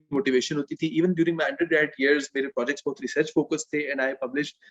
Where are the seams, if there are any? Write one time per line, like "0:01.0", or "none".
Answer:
none